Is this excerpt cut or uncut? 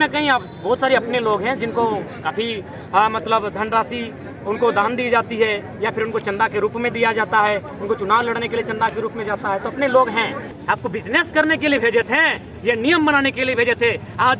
cut